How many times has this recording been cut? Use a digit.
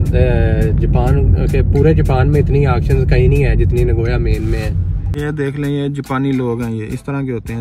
1